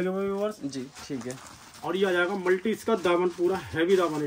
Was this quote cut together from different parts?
no; 0 cuts

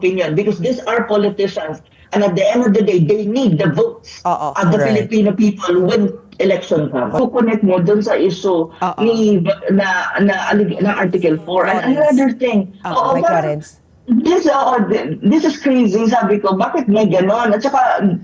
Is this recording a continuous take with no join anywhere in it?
no; 1 cut; at 7.2 s

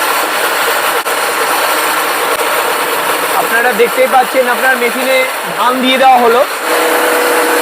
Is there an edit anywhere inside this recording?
yes; 1 cut; at 6.7 s

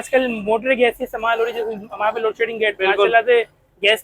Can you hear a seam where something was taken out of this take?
no; 0 cuts

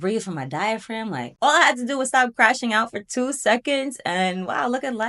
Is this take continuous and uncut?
no; 1 cut; at 1.3 s

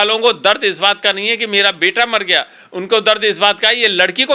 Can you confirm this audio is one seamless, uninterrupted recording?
yes; 0 cuts

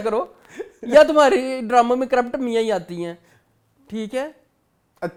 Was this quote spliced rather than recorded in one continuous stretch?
no; 0 cuts

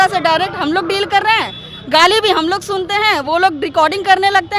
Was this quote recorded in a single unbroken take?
yes; 0 cuts

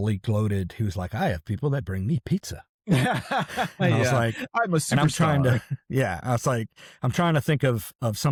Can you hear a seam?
no; 0 cuts

